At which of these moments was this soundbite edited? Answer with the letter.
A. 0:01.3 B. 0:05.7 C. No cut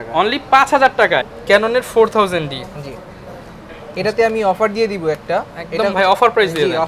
A